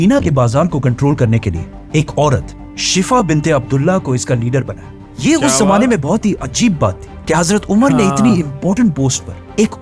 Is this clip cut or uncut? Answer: uncut